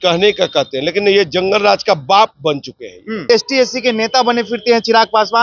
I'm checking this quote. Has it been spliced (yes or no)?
yes